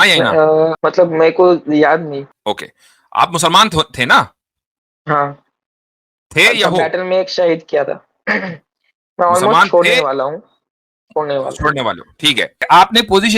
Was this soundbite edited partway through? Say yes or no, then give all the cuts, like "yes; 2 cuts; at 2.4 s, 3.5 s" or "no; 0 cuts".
yes; 3 cuts; at 0.8 s, 2.3 s, 12.6 s